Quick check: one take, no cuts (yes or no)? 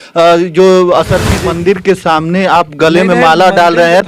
no